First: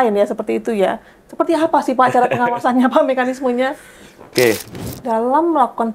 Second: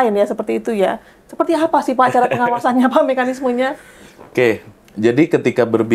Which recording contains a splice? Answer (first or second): first